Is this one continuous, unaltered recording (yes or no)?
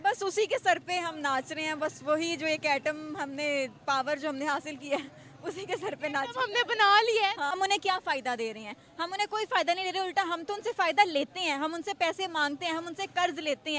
no